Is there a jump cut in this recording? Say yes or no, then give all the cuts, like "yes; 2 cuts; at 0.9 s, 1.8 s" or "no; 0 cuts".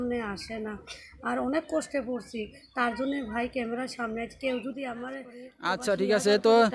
yes; 1 cut; at 5.5 s